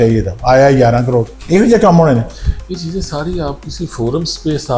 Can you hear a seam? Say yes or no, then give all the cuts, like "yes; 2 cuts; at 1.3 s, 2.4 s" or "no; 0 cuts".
yes; 1 cut; at 1.4 s